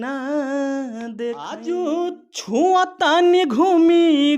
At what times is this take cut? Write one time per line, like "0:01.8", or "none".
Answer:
0:01.5